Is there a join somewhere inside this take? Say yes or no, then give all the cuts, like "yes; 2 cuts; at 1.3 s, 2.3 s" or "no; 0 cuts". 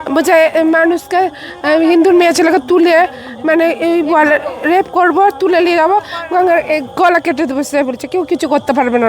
no; 0 cuts